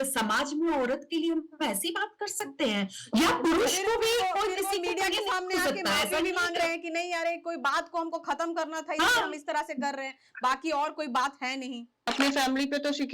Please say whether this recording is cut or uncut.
cut